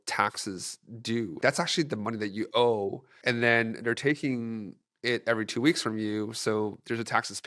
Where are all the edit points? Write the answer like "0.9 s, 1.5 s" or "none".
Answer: 1.4 s